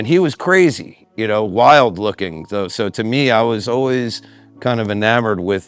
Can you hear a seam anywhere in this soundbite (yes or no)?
no